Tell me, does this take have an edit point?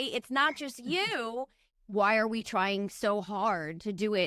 yes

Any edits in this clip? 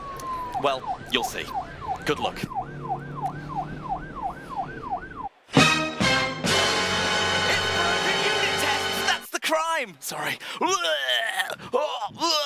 no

